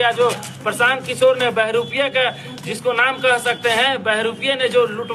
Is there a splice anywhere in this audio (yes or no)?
no